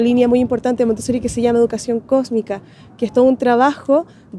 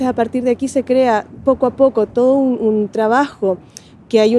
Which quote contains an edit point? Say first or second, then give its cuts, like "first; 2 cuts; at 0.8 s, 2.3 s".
second; 1 cut; at 1.3 s